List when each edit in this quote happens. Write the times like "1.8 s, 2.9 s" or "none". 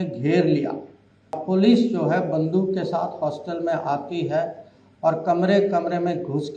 1.4 s